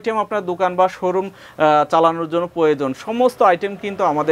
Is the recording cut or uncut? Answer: uncut